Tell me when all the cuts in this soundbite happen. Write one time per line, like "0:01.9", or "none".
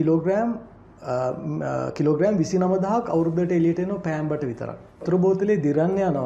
0:05.0